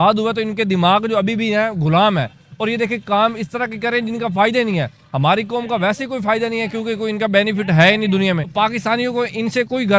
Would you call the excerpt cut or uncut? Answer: cut